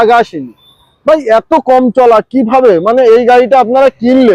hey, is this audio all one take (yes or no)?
yes